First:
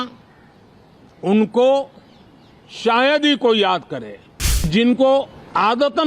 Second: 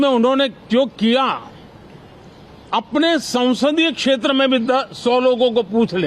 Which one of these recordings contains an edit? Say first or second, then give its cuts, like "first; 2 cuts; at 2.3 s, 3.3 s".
first; 1 cut; at 4.7 s